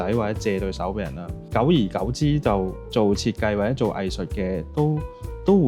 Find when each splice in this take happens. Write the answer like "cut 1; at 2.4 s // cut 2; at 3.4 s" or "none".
cut 1; at 1.4 s // cut 2; at 2.8 s